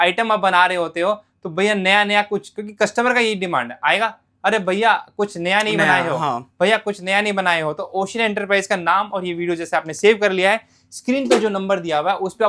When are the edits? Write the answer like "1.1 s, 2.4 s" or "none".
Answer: none